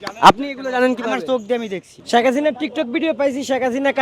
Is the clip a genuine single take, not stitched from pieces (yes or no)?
no